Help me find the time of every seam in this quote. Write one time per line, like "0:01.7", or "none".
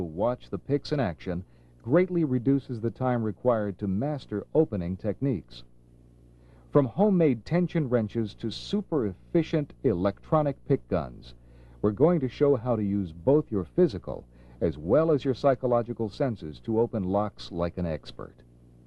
0:05.7